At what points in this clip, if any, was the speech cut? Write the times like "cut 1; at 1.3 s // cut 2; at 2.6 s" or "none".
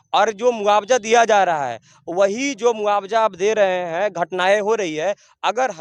none